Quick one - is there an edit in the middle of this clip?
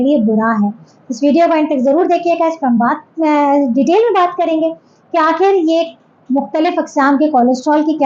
no; 0 cuts

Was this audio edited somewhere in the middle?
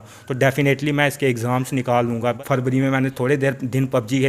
yes; 1 cut; at 2.4 s

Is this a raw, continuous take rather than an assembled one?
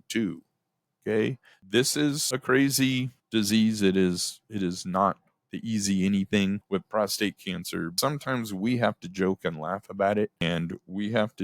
no; 6 cuts; at 1.5 s, 2.2 s, 3.1 s, 6.6 s, 7.9 s, 10.4 s

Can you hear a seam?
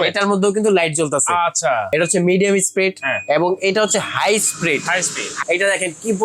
yes; 2 cuts; at 1.9 s, 5.3 s

